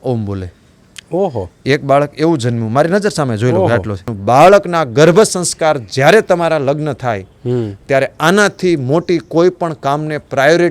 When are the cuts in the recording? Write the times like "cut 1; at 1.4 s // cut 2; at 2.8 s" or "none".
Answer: cut 1; at 4.1 s

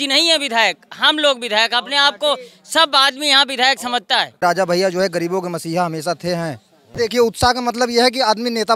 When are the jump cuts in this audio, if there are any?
cut 1; at 4.4 s // cut 2; at 6.9 s

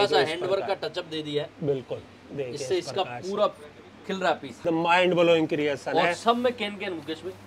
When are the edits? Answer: cut 1; at 4.6 s

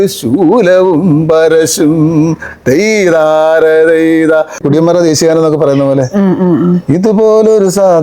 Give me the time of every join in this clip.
cut 1; at 4.6 s

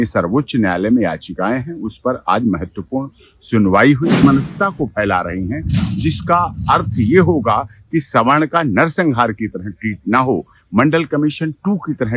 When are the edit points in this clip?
cut 1; at 4.2 s

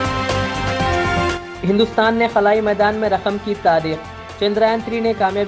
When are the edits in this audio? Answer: cut 1; at 1.3 s

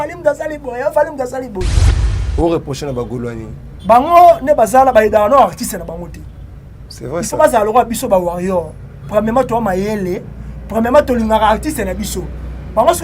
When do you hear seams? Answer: cut 1; at 1.8 s

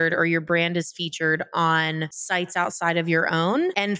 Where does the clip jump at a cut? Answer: none

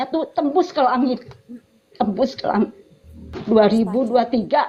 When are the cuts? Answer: none

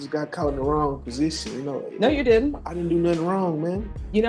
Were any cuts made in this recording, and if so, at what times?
none

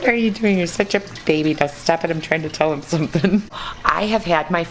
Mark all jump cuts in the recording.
cut 1; at 3.6 s

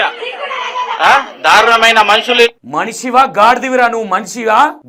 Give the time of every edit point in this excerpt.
none

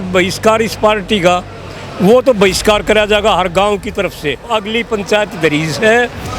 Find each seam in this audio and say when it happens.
cut 1; at 4.5 s

